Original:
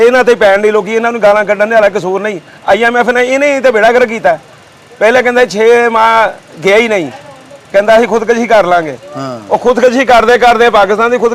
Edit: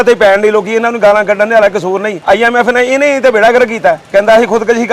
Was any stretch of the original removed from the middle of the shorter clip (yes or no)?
yes